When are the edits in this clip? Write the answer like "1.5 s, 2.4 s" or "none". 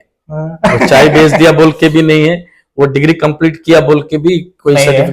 none